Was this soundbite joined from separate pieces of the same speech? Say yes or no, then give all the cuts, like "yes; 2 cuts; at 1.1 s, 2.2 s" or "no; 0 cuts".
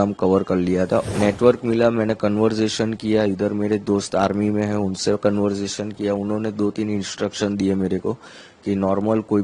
yes; 1 cut; at 1.1 s